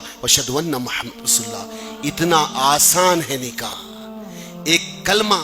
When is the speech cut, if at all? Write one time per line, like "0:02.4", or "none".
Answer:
0:03.8